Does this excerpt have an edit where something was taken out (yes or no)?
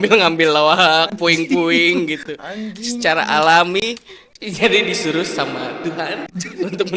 no